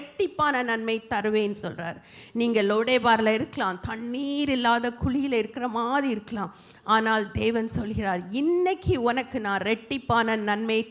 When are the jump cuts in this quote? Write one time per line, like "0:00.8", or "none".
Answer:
none